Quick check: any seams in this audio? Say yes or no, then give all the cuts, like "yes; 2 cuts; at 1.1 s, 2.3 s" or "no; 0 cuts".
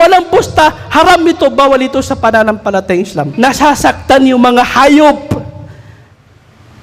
yes; 1 cut; at 3.3 s